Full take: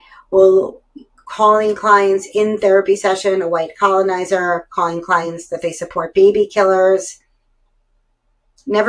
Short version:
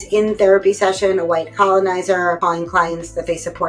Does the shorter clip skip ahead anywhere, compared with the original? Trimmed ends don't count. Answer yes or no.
yes